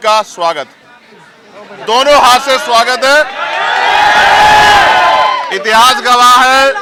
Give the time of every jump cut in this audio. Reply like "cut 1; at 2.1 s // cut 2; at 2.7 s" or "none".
none